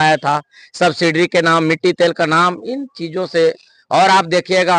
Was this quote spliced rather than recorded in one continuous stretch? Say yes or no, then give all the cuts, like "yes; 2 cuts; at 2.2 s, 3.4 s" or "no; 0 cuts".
no; 0 cuts